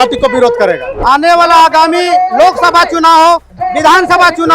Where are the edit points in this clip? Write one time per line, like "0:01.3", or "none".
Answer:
0:01.0